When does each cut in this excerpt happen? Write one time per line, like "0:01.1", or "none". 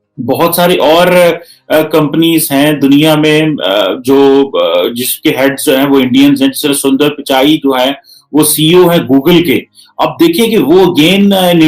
none